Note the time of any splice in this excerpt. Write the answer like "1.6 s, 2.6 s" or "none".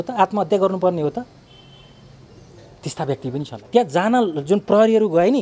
3.5 s